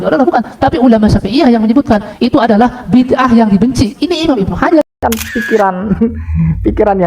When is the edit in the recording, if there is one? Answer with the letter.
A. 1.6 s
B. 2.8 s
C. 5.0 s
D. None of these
C